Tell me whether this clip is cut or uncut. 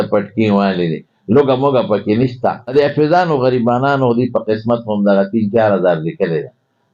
cut